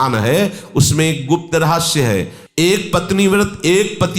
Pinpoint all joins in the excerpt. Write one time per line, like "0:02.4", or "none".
0:02.4